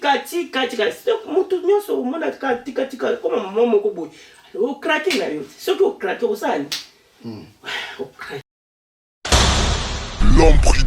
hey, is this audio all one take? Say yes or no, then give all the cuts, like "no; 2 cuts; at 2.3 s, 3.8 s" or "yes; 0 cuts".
no; 1 cut; at 8.4 s